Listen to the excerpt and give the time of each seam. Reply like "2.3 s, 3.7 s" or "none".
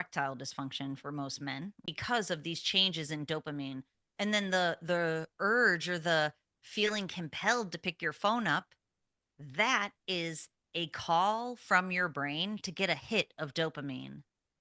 1.9 s